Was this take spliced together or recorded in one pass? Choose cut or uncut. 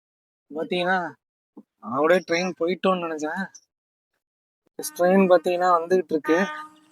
cut